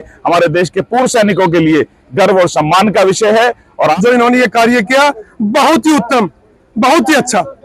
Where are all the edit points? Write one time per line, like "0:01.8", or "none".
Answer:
0:03.9